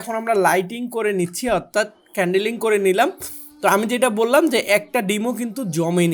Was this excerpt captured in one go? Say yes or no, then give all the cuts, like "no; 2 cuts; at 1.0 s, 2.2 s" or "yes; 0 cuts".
yes; 0 cuts